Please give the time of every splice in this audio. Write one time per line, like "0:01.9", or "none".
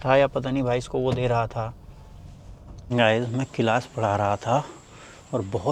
0:02.9